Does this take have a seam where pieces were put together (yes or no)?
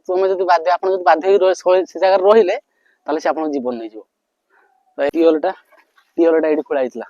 yes